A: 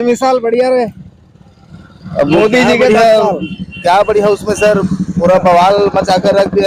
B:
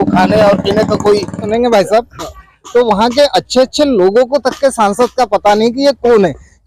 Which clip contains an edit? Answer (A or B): B